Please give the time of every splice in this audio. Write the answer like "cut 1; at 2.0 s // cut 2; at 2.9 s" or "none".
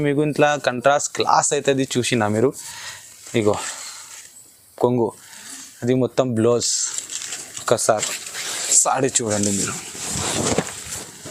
none